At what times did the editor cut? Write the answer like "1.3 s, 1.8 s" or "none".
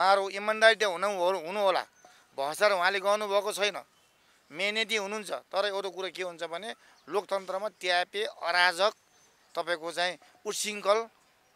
none